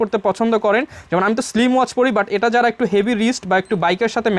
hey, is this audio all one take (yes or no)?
yes